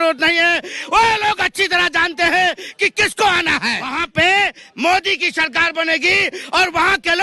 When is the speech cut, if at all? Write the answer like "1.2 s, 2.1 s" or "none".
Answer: 4.0 s